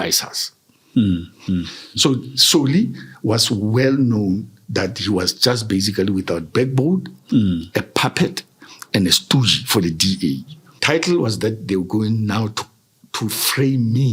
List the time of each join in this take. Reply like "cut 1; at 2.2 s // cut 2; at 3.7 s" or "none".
cut 1; at 10.8 s